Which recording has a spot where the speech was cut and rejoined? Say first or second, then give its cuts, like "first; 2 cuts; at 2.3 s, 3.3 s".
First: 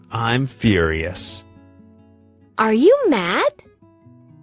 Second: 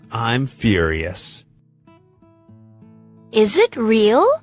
first; 1 cut; at 1.1 s